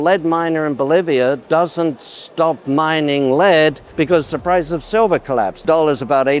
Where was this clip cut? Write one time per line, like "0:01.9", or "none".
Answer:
0:01.4
0:03.8
0:05.6